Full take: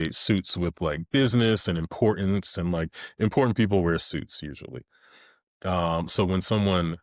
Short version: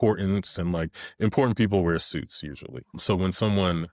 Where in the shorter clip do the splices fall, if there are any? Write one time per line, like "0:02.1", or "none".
0:03.0